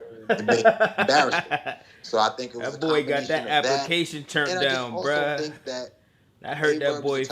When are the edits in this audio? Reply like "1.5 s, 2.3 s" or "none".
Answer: none